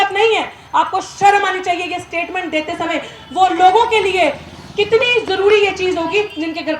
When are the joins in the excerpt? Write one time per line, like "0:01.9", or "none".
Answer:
none